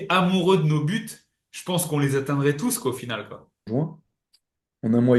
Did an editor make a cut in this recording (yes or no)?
yes